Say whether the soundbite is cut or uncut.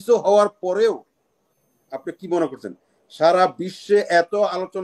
uncut